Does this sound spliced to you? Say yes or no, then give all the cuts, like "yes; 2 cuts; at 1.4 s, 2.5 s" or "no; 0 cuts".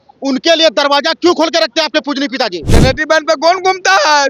yes; 1 cut; at 2.7 s